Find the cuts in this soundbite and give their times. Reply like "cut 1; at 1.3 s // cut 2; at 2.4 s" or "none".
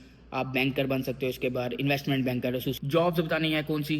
cut 1; at 2.8 s